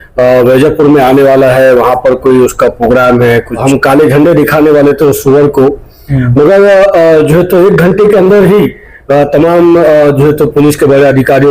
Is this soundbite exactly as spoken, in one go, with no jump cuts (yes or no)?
no